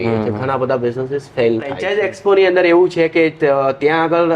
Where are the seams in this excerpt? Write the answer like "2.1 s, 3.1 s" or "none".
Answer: 1.8 s